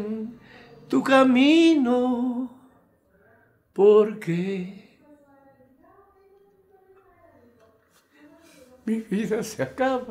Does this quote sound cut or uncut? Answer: uncut